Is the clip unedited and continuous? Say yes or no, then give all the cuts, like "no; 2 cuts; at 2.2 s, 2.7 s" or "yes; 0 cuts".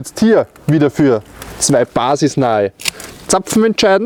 yes; 0 cuts